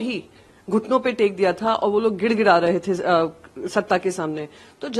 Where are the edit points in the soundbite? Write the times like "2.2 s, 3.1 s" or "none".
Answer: none